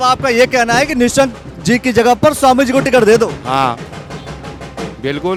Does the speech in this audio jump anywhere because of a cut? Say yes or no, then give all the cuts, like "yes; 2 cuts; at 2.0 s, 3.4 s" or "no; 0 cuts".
no; 0 cuts